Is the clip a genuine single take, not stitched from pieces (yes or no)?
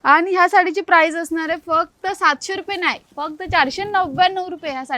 yes